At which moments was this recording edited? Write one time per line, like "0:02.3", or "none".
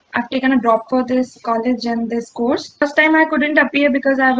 0:02.9